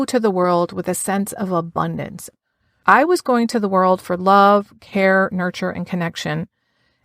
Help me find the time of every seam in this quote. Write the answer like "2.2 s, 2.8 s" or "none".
2.5 s